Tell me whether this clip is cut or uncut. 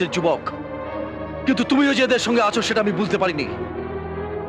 uncut